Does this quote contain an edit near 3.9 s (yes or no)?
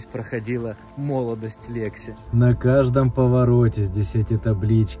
no